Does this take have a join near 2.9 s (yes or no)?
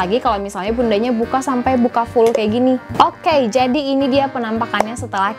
yes